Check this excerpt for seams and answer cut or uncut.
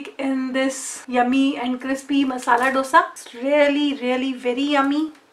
cut